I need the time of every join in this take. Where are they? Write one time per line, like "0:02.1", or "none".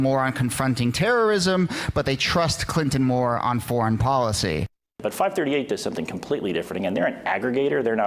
none

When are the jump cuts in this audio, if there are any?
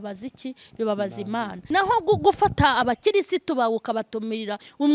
0:01.6

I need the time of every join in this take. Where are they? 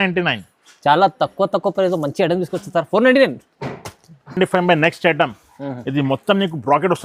none

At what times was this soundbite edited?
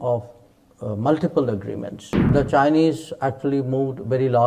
0:02.3

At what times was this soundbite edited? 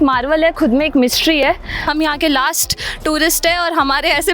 0:01.8

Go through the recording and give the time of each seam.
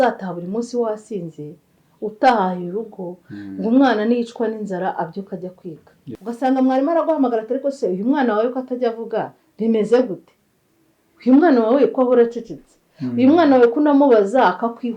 0:06.2

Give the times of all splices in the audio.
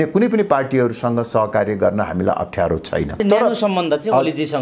0:03.2

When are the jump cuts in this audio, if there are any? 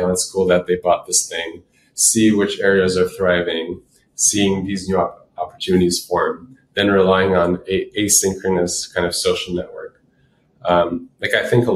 none

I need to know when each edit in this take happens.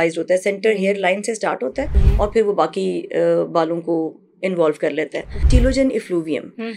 0:02.0
0:05.4

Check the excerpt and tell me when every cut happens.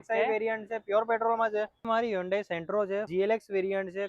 0:01.8
0:03.1

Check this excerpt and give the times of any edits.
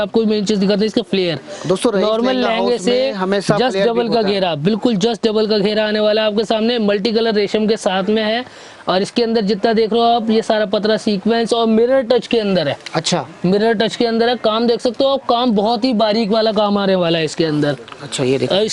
none

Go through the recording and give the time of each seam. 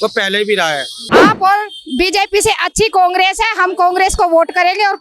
0:01.0

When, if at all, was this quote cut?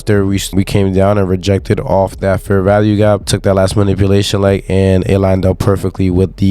0:03.2

